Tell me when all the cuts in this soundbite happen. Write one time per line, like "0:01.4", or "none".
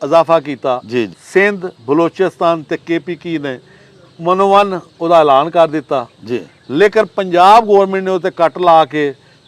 0:01.2

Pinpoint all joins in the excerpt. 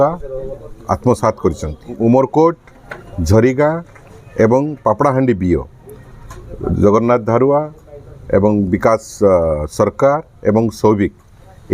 0:01.9

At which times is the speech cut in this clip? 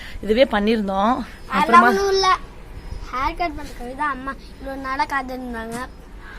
0:01.4

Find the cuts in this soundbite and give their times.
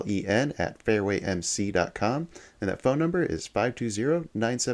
none

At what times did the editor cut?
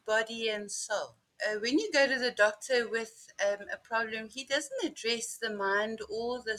0:01.2

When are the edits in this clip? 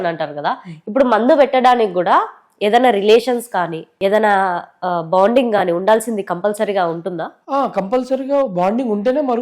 none

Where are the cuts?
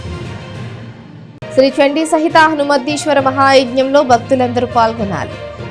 0:01.3

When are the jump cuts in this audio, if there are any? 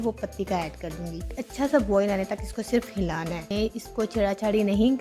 0:01.4
0:03.5

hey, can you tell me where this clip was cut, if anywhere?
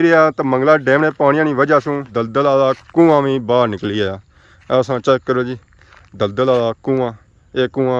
0:02.1

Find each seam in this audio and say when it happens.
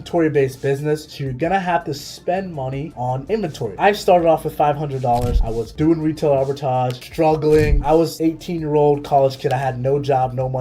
0:01.2
0:05.7
0:08.0

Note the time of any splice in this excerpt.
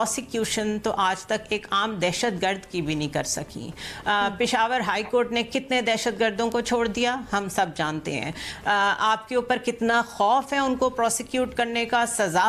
none

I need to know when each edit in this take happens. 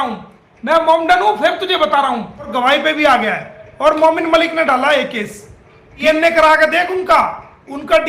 0:02.5
0:06.0

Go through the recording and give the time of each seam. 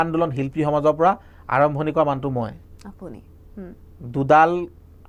none

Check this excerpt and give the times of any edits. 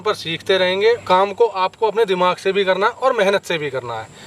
0:01.0

